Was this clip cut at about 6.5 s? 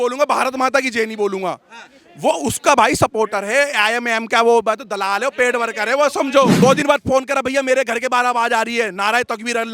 yes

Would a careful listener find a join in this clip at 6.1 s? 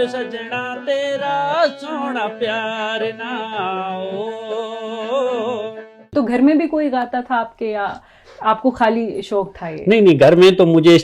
yes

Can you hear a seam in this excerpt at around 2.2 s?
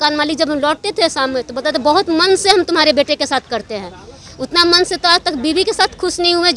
no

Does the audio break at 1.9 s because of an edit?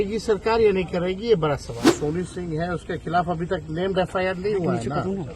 yes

